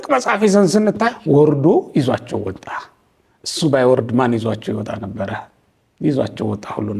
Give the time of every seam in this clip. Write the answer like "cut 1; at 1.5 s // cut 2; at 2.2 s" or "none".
cut 1; at 1.2 s